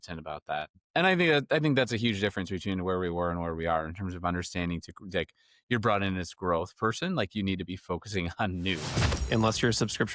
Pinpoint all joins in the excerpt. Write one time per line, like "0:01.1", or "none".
0:09.1